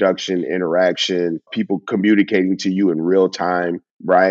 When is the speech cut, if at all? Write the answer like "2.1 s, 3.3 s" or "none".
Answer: 1.5 s